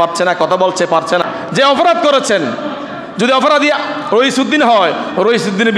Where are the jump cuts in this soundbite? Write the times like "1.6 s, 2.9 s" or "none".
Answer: 1.2 s